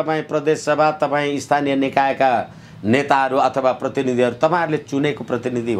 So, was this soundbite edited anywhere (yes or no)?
no